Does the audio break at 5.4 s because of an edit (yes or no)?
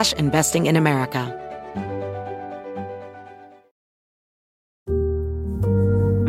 no